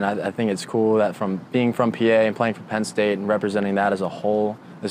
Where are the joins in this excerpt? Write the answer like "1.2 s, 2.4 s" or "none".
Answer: none